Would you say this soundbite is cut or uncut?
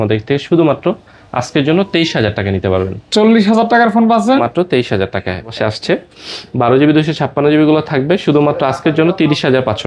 cut